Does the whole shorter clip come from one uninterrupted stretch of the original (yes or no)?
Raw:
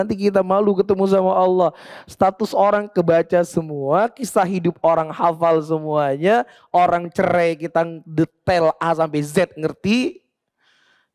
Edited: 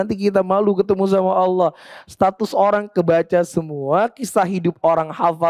yes